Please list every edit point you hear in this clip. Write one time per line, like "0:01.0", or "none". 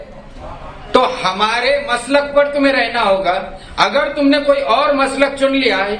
none